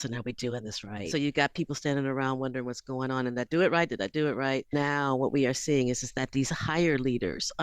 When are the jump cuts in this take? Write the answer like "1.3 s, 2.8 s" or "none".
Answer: 1.1 s, 4.7 s

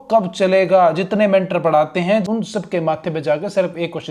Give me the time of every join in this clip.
2.3 s

